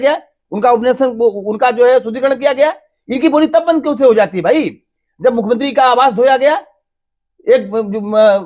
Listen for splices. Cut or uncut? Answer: uncut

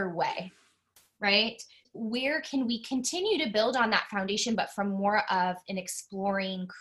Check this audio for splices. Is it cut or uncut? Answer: cut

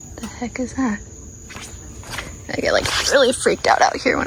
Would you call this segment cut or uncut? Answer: uncut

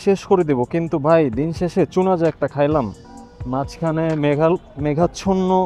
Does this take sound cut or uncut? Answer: cut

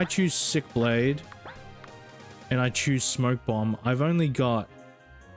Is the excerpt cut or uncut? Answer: uncut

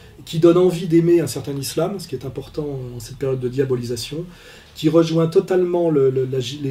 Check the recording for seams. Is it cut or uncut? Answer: uncut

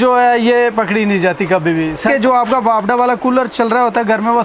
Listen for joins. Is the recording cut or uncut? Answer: cut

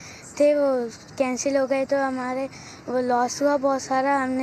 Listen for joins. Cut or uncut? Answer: uncut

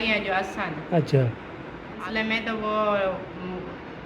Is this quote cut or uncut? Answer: cut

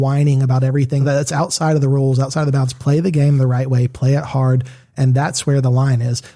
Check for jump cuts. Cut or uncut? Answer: cut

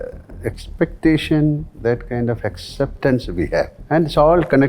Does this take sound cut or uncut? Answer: cut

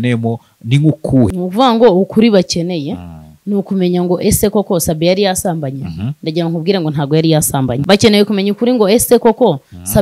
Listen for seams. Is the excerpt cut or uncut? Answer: cut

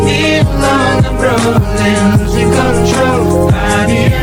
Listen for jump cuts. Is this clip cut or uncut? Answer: uncut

